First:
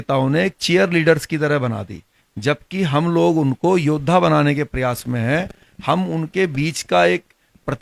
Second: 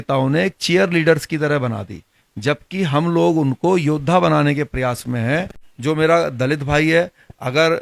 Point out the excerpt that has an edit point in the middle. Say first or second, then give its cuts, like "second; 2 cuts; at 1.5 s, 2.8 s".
second; 1 cut; at 5.6 s